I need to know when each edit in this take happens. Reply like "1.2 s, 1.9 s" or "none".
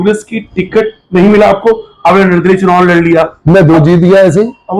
none